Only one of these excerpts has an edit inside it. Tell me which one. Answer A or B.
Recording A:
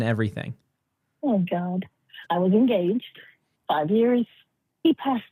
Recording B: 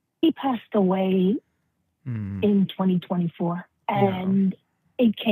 B